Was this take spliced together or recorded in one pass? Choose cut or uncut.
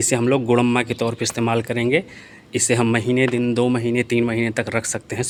uncut